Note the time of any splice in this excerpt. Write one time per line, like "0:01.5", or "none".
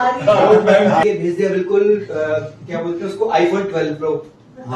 0:01.0

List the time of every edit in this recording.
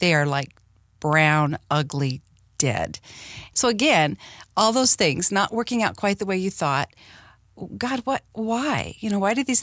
0:03.4

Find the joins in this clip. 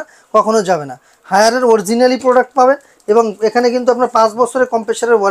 none

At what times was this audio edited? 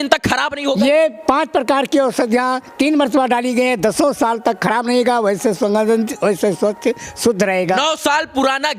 none

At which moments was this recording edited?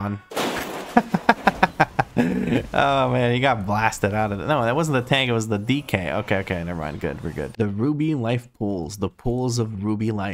0:07.5

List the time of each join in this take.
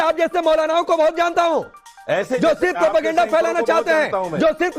none

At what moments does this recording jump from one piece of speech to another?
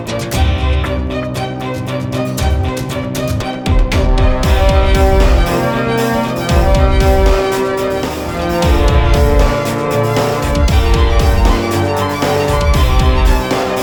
none

